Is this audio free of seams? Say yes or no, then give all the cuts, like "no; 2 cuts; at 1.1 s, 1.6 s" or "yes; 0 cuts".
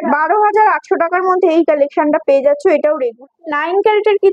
no; 1 cut; at 3.1 s